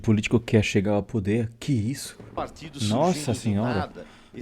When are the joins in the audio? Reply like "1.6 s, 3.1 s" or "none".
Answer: 2.2 s